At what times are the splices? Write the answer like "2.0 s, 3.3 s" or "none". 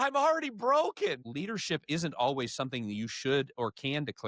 1.2 s